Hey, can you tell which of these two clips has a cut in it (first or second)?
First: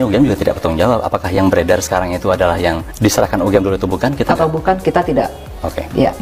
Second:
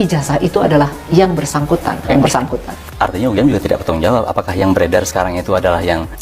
second